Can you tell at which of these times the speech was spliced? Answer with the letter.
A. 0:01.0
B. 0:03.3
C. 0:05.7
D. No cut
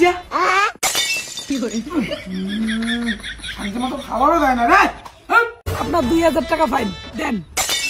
C